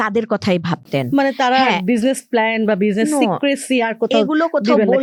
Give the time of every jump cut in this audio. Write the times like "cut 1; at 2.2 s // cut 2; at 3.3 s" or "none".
none